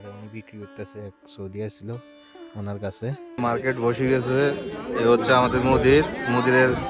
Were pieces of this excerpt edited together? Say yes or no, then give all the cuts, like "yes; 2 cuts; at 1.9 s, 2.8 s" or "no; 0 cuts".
yes; 1 cut; at 3.3 s